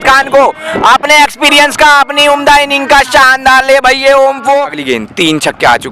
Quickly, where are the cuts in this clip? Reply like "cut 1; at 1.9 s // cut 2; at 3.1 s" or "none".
cut 1; at 4.7 s

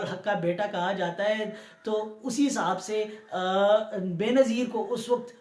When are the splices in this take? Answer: none

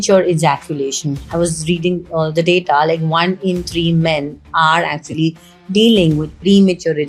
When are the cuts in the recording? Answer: none

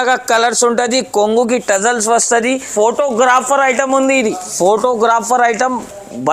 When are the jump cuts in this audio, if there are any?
cut 1; at 2.7 s

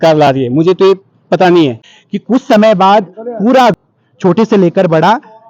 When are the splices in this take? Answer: cut 1; at 1.9 s // cut 2; at 3.8 s

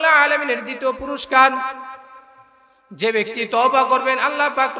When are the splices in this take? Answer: none

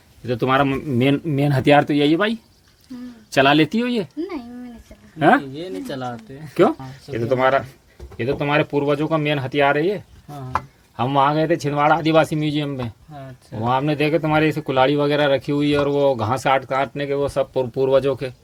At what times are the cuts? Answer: none

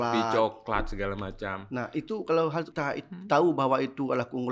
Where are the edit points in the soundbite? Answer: cut 1; at 2.7 s

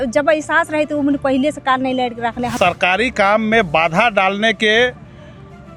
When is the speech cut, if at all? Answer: cut 1; at 2.5 s

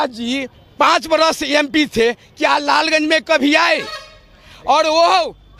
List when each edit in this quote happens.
none

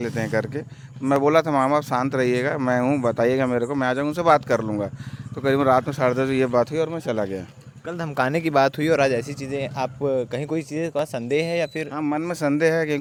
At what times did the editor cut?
none

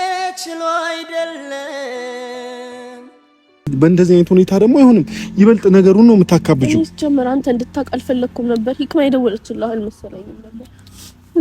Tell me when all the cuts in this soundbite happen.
cut 1; at 3.7 s

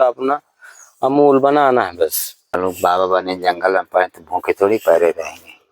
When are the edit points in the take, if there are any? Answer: cut 1; at 2.6 s

